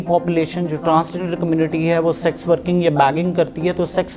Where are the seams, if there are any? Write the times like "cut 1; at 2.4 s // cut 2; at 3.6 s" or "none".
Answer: none